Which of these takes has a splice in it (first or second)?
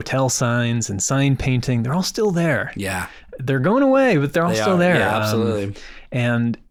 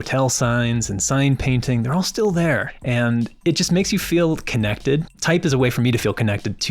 second